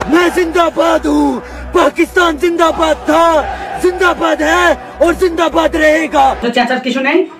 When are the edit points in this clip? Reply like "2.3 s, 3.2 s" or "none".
6.4 s

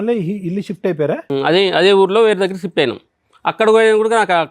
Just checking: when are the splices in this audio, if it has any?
1.2 s

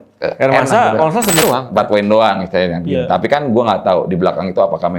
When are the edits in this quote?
1.4 s

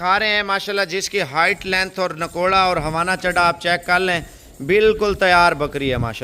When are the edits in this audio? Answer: none

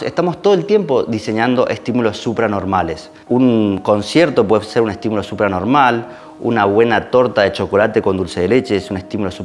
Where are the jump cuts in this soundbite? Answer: none

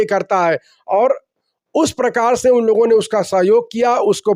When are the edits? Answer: none

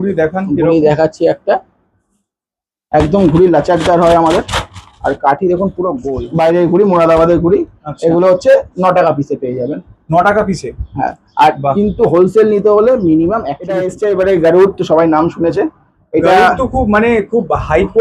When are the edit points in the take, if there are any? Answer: 6.1 s, 13.9 s

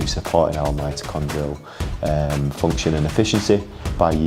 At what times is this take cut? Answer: none

